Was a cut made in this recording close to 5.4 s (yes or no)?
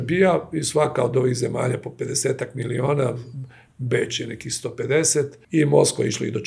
yes